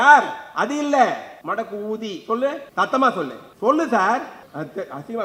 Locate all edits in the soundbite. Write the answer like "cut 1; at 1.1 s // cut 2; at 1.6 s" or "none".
cut 1; at 1.3 s // cut 2; at 2.6 s // cut 3; at 3.4 s // cut 4; at 4.4 s